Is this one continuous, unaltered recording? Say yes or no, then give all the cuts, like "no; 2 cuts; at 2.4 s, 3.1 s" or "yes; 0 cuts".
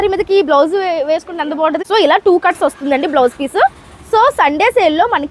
no; 1 cut; at 1.8 s